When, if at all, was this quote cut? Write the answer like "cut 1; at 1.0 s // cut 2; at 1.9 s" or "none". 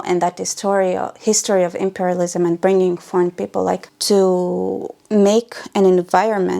cut 1; at 3.9 s // cut 2; at 4.9 s